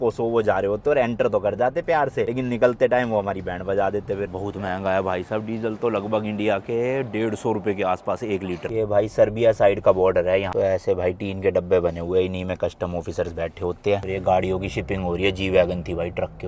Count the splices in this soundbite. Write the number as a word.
four